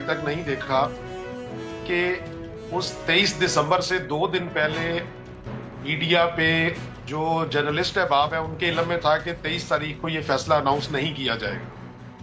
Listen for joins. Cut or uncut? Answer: cut